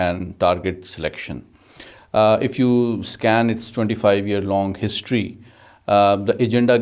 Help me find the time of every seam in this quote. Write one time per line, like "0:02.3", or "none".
none